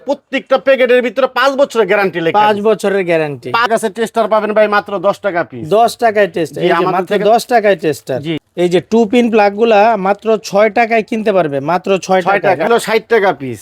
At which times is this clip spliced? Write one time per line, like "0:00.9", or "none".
0:03.6
0:08.5
0:12.7